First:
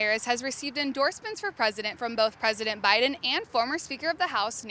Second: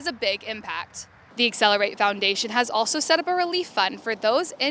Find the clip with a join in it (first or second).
second